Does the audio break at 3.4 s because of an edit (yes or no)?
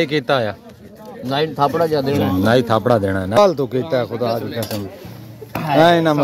yes